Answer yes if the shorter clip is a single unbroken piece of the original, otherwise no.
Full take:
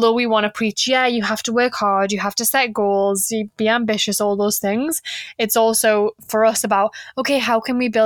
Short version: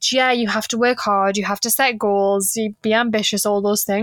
yes